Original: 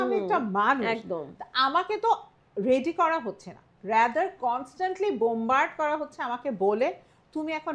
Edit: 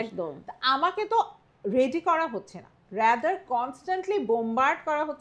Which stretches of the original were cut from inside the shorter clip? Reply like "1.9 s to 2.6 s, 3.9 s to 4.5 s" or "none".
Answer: none